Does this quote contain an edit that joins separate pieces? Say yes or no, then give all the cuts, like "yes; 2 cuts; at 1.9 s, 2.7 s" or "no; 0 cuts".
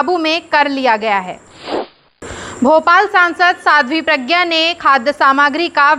yes; 1 cut; at 1.9 s